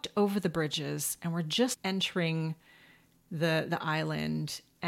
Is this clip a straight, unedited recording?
no; 1 cut; at 1.8 s

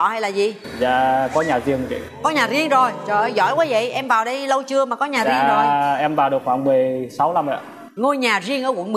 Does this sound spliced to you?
no; 0 cuts

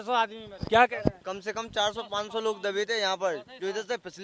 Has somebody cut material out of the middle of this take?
no; 0 cuts

